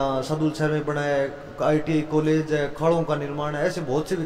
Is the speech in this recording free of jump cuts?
yes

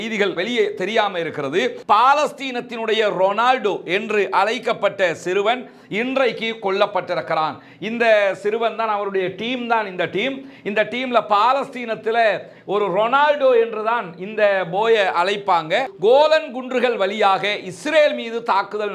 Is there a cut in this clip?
yes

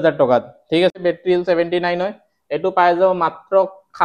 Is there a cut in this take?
yes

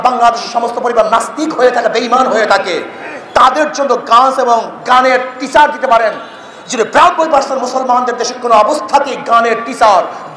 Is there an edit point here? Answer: no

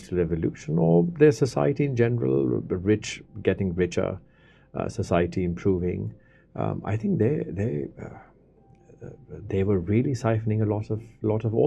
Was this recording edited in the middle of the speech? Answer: no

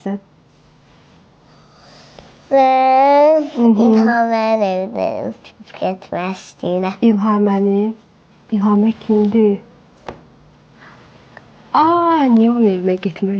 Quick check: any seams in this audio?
no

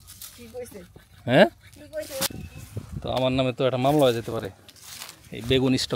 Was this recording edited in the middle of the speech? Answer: yes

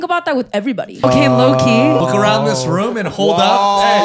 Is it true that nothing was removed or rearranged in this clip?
no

